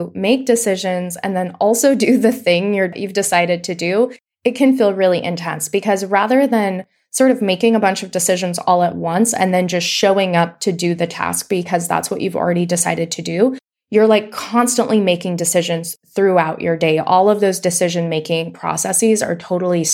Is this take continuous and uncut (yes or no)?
no